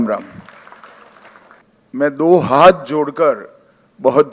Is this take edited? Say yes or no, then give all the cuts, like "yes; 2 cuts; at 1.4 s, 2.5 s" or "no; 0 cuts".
yes; 1 cut; at 1.6 s